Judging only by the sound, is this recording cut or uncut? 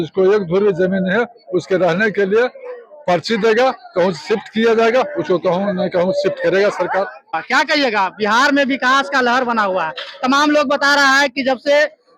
cut